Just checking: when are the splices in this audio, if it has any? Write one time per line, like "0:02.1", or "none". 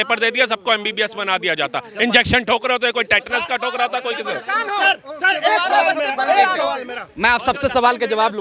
none